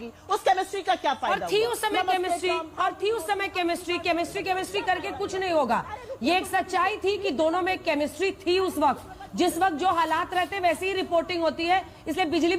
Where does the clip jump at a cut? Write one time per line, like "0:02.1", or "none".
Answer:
none